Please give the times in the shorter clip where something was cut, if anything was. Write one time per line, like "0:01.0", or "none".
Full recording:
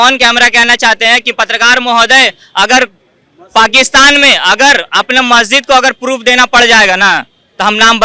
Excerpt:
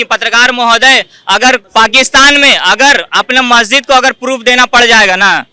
0:01.7